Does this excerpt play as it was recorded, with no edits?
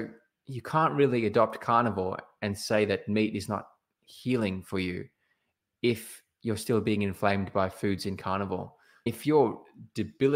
no; 1 cut; at 9.1 s

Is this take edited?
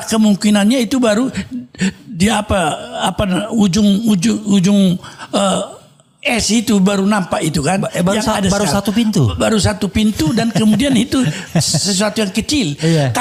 no; 0 cuts

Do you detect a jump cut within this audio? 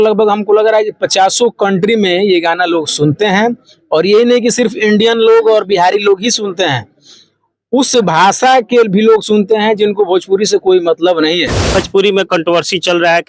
yes; 1 cut; at 11.7 s

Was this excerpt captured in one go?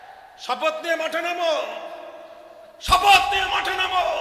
yes; 0 cuts

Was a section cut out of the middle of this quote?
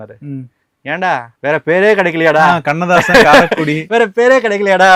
no; 0 cuts

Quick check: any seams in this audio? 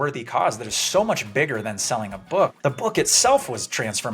yes; 1 cut; at 2.5 s

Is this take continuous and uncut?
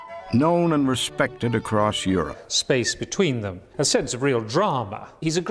yes; 0 cuts

